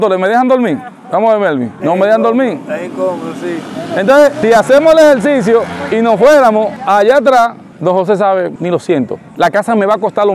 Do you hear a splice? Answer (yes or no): no